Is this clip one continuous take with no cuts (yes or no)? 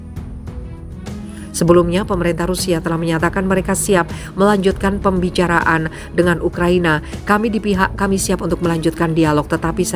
no